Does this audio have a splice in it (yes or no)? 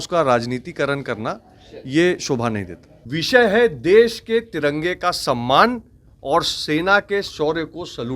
yes